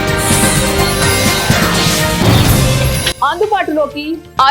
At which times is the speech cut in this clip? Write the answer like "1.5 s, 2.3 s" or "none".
3.1 s